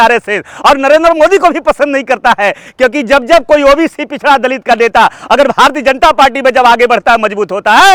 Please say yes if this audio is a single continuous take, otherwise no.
yes